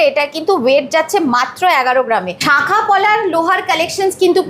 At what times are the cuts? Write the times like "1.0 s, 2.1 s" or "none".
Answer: 2.3 s

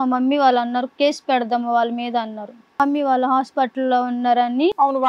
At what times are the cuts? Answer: 2.7 s

